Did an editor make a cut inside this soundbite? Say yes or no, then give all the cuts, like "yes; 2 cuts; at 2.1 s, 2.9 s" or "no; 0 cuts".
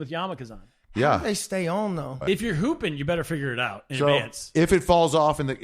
yes; 1 cut; at 2.2 s